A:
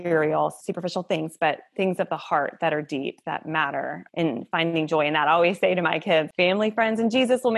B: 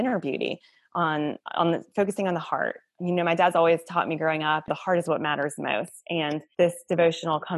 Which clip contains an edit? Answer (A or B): B